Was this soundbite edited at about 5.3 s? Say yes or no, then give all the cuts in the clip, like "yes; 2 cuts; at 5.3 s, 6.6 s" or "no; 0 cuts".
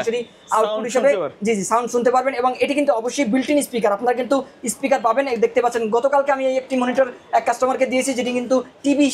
no; 0 cuts